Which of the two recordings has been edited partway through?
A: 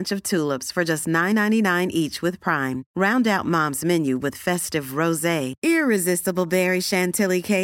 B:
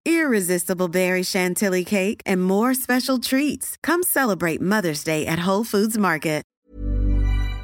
B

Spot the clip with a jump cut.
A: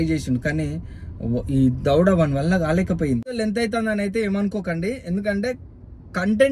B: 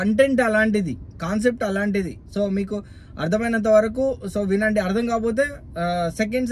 A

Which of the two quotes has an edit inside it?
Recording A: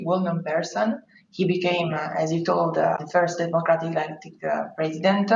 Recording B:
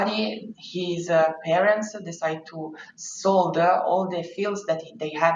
A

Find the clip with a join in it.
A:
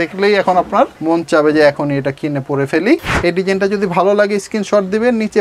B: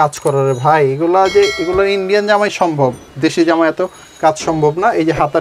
A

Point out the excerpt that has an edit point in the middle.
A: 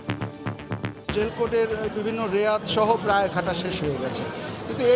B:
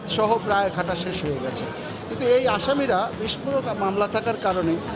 A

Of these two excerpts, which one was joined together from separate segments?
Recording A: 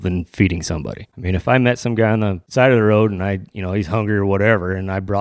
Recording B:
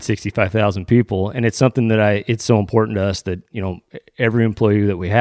A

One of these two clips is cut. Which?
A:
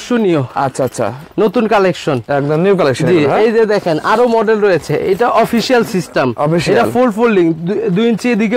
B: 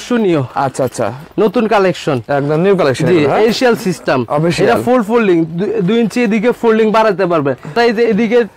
B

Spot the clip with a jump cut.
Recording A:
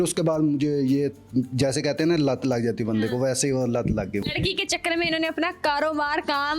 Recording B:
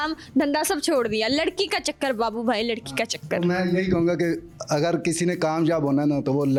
A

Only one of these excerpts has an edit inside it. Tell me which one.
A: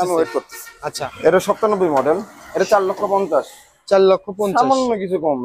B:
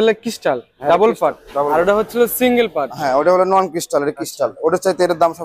A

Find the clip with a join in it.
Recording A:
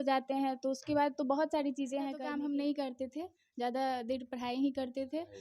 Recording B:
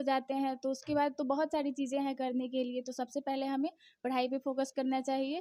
A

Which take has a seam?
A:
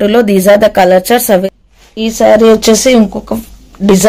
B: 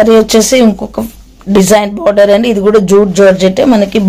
A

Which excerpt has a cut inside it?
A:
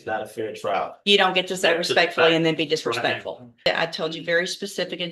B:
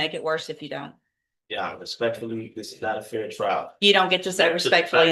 A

